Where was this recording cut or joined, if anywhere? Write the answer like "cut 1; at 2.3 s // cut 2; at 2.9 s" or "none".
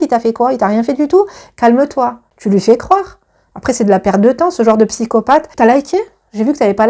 cut 1; at 2.3 s // cut 2; at 5.5 s